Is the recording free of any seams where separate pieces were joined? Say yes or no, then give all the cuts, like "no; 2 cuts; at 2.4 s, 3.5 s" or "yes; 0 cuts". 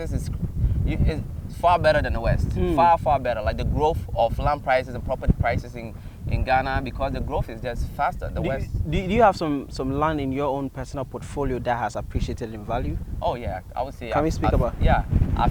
yes; 0 cuts